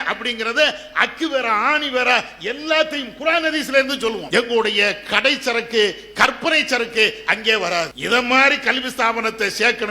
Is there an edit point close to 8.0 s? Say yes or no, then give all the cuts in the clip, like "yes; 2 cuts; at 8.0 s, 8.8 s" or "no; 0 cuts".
yes; 2 cuts; at 4.2 s, 8.0 s